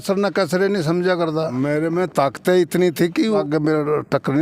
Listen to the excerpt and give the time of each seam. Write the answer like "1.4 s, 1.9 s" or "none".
1.5 s, 3.4 s